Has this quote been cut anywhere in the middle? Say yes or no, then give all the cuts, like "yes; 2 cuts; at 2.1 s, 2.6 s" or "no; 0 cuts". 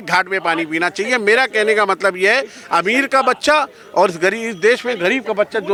no; 0 cuts